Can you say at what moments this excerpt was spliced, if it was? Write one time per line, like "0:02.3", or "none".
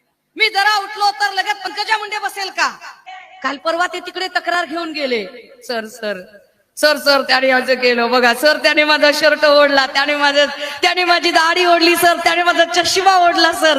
0:03.0